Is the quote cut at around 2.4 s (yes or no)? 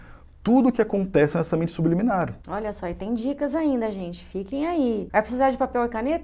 yes